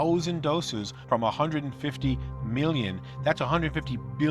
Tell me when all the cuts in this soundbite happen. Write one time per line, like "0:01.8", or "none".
none